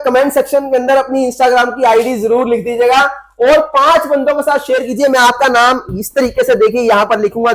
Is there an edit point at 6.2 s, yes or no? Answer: no